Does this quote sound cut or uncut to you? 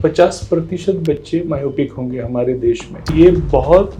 cut